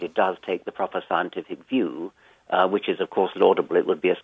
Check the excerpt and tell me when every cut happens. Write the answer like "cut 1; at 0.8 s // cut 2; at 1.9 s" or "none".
cut 1; at 3.0 s